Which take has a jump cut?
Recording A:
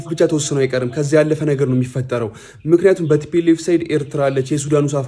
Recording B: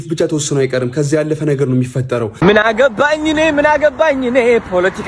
B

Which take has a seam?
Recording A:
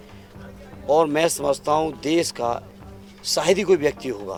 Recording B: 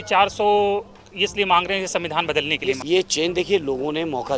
B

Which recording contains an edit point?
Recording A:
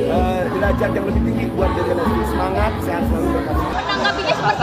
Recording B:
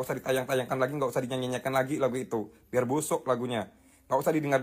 A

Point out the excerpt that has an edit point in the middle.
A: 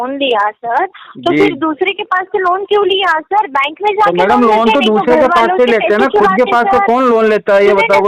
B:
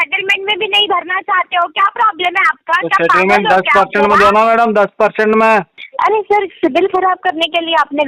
B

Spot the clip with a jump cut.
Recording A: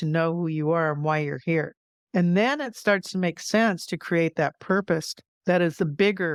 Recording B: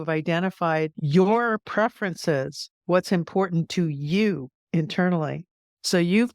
B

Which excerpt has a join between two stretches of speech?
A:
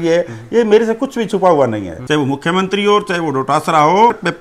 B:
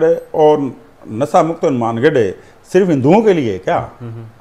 A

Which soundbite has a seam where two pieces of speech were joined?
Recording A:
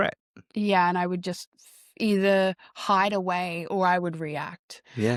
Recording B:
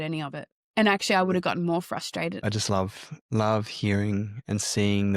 B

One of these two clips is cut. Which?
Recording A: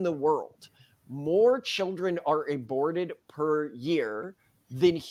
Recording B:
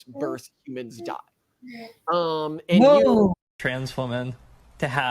B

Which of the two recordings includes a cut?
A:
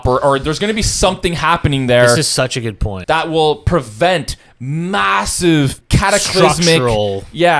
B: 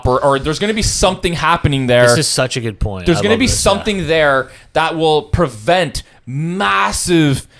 A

